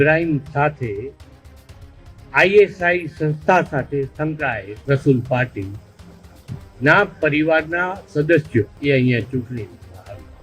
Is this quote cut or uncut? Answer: cut